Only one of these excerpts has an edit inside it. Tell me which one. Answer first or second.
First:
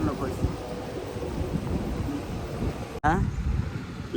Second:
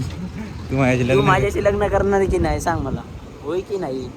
first